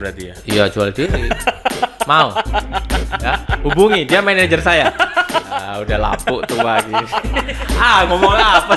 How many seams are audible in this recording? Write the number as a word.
two